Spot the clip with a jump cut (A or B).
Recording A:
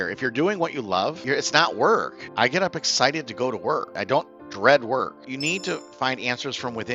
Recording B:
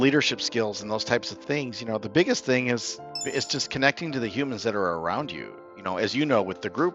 A